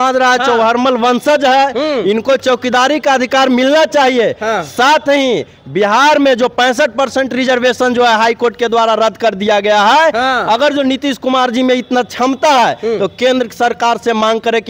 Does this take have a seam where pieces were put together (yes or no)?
no